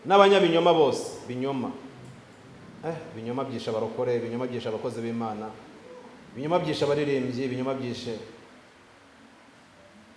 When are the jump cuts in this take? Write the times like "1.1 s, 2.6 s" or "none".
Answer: none